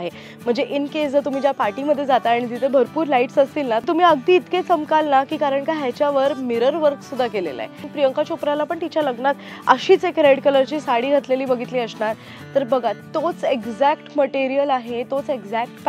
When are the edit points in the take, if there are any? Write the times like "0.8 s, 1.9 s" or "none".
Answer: 3.8 s, 7.8 s